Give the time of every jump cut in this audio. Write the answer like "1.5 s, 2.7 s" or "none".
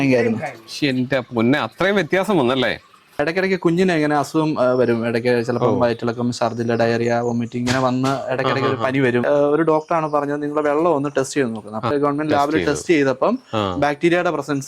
3.2 s, 9.2 s, 11.9 s